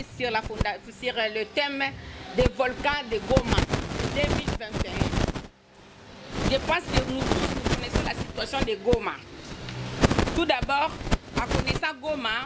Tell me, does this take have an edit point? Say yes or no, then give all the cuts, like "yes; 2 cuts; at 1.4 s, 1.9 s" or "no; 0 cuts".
no; 0 cuts